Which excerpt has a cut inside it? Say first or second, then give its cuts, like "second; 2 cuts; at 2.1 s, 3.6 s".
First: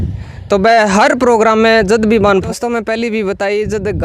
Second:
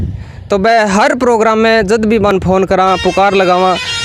first; 1 cut; at 2.4 s